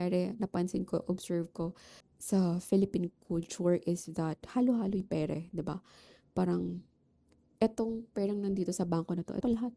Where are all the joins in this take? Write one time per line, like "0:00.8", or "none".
none